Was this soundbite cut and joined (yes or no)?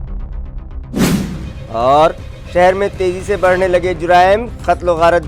no